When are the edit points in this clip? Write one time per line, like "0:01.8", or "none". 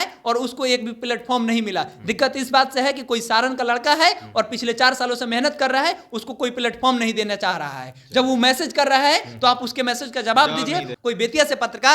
0:10.9